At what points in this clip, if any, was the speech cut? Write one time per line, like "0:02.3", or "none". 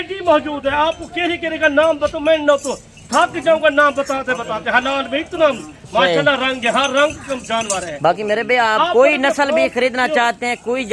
none